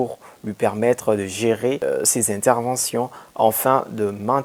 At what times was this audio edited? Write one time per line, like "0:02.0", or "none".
0:01.8